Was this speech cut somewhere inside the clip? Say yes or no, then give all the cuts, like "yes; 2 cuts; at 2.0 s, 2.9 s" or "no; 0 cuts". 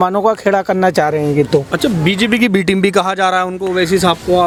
no; 0 cuts